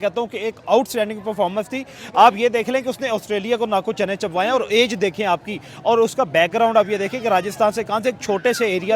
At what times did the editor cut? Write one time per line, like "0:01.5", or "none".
none